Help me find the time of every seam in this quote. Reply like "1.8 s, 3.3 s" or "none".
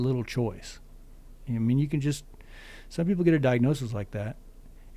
none